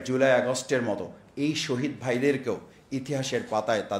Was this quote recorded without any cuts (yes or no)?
yes